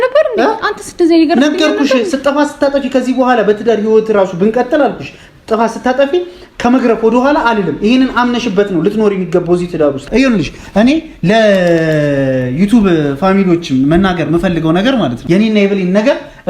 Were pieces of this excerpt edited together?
yes; 2 cuts; at 10.1 s, 15.2 s

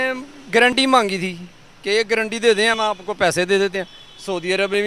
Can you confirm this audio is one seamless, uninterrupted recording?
yes; 0 cuts

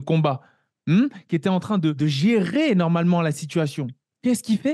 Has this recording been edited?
yes; 1 cut; at 2.0 s

